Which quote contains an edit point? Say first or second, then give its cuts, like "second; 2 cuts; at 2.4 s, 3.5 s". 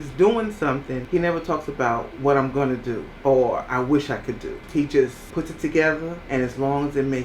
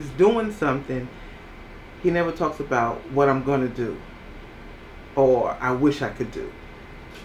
first; 5 cuts; at 1.0 s, 3.1 s, 4.5 s, 5.2 s, 6.1 s